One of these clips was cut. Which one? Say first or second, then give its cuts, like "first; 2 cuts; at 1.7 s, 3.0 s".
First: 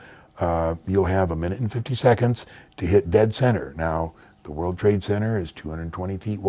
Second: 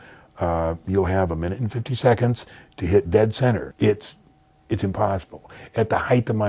second; 1 cut; at 3.7 s